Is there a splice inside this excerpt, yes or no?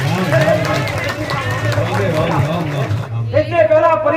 yes